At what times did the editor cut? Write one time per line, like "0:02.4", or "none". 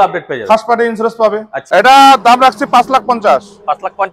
0:01.6